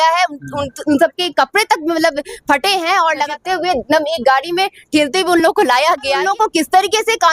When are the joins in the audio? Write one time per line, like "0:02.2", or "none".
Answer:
0:03.3
0:06.2